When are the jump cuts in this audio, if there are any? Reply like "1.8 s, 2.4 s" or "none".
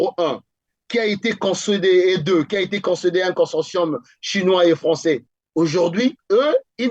5.4 s